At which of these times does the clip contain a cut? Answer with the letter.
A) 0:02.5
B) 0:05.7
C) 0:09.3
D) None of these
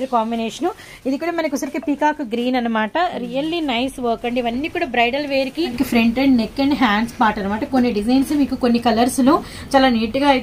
B